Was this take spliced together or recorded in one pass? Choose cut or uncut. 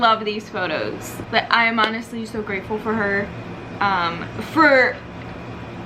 cut